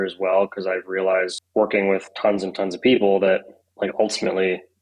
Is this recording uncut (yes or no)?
no